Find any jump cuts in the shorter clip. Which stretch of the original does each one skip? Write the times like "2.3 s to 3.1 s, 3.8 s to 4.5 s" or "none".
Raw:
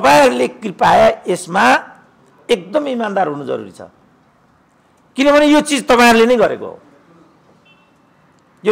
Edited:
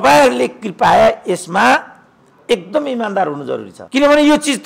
3.8 s to 5.0 s